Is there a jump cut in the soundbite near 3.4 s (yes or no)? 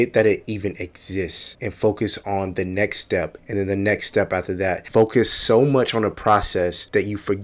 no